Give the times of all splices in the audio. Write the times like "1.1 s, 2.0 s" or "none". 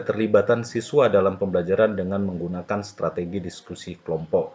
none